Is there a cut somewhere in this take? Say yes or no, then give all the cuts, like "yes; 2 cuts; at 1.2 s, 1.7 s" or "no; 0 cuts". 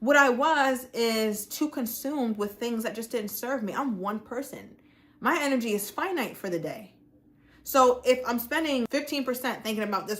yes; 1 cut; at 8.9 s